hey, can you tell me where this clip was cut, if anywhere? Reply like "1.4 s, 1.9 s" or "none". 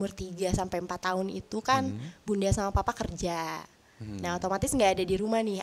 none